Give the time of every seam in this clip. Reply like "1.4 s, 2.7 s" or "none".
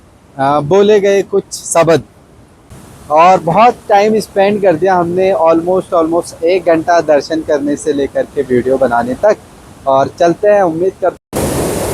2.5 s, 11.2 s